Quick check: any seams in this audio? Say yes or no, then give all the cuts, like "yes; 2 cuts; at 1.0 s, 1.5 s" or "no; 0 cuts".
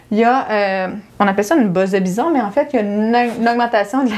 yes; 1 cut; at 1.0 s